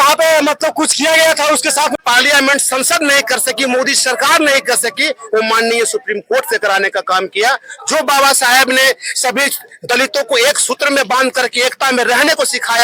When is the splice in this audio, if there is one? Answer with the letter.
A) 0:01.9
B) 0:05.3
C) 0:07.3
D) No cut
A